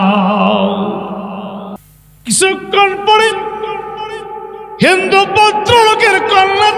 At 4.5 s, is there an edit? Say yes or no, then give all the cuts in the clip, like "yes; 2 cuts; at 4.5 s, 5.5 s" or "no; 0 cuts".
no; 1 cut; at 1.8 s